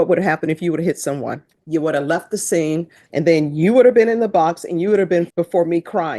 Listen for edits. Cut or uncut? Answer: cut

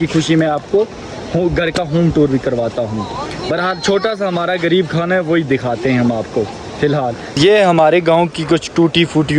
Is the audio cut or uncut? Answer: uncut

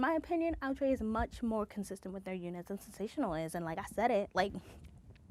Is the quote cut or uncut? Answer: uncut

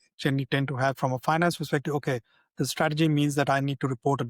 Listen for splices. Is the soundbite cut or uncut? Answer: uncut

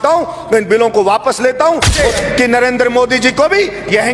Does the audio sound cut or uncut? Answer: cut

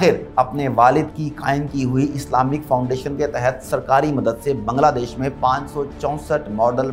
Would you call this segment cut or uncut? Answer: uncut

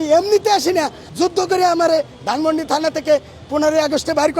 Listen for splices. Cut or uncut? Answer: cut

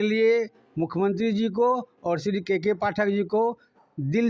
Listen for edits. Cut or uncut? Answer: uncut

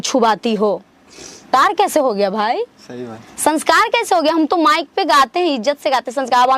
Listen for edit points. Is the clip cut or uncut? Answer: cut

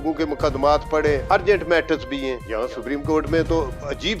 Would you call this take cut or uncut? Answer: cut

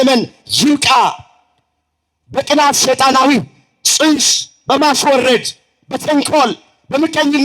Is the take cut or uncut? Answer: uncut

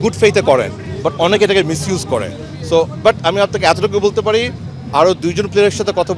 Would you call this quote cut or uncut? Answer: uncut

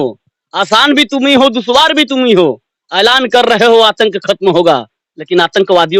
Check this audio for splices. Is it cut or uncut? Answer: uncut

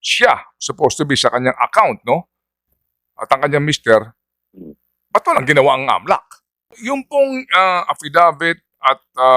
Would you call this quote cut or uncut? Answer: cut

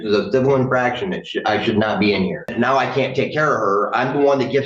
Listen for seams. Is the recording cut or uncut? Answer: cut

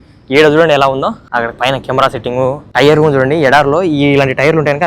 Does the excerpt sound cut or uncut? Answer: cut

